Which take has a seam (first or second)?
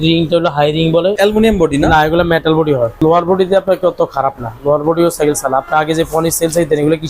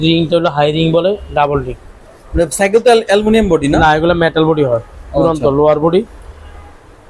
first